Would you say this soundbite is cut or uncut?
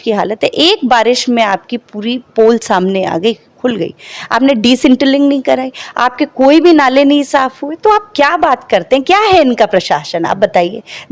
uncut